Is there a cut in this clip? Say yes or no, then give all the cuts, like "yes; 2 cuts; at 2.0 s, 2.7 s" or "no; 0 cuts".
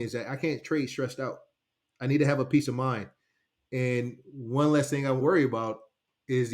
yes; 1 cut; at 5.2 s